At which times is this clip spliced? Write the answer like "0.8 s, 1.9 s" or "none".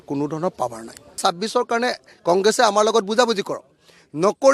1.2 s